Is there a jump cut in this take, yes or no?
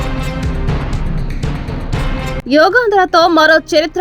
no